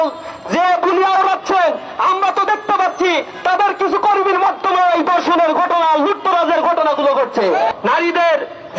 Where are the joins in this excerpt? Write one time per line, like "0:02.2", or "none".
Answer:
0:07.7